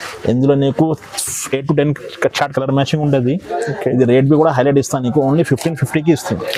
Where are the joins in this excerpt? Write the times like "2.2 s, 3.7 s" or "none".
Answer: none